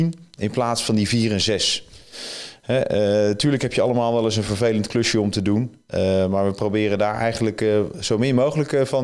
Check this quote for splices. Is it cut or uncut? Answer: uncut